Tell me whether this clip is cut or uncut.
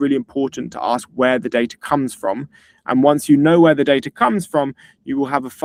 uncut